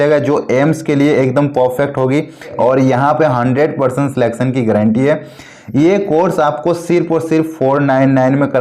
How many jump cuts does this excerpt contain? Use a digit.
1